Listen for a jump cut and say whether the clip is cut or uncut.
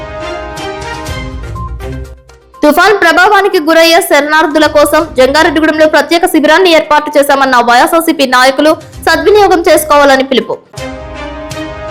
uncut